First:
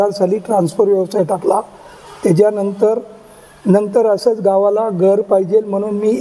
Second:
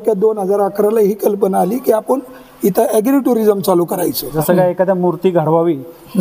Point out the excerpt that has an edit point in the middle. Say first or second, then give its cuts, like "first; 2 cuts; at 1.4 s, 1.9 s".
second; 1 cut; at 4.3 s